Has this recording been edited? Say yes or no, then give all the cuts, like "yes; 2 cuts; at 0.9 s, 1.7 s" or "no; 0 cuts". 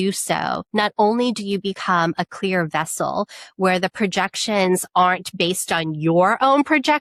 no; 0 cuts